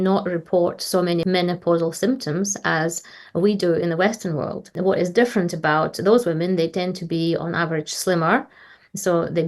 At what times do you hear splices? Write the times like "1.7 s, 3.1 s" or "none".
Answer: 1.2 s, 4.7 s